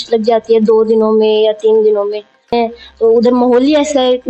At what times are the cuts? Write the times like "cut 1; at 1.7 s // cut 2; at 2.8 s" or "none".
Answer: cut 1; at 2.5 s